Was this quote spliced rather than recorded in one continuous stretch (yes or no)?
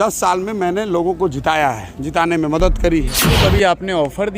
yes